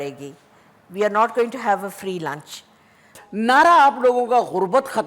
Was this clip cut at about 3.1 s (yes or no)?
yes